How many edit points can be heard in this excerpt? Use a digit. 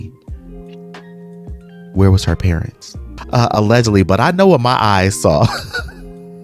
1